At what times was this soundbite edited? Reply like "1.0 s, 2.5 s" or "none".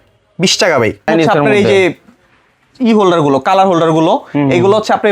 1.1 s